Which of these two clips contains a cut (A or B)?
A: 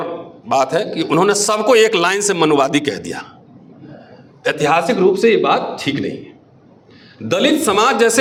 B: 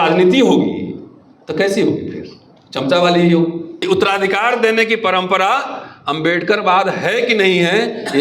B